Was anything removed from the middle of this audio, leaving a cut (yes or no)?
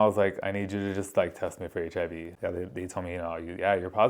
yes